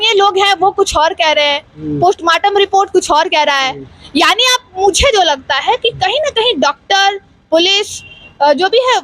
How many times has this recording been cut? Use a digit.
0